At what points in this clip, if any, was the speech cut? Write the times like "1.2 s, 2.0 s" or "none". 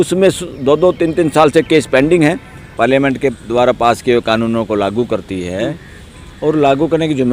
2.7 s